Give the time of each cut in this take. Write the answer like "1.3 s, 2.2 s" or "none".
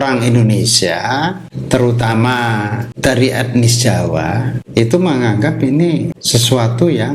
1.5 s, 2.8 s, 4.6 s, 6.2 s